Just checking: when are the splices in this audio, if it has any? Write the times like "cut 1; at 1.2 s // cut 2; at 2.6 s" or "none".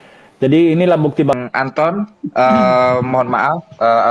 cut 1; at 1.3 s